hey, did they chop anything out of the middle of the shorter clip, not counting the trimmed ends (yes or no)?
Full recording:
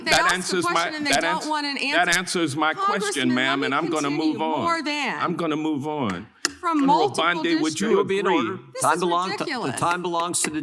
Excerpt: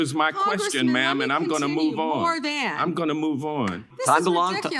yes